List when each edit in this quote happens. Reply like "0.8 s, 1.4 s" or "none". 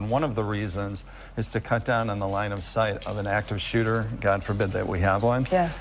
none